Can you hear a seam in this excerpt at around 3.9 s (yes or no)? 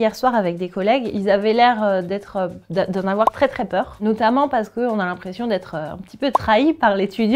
yes